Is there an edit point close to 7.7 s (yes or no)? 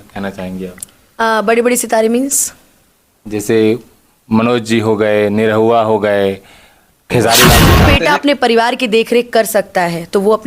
yes